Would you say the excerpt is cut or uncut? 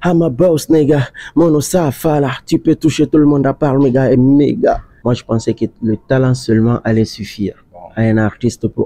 cut